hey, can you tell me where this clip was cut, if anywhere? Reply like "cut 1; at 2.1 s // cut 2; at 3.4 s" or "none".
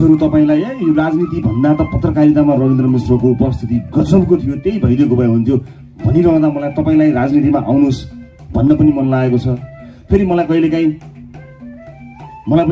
none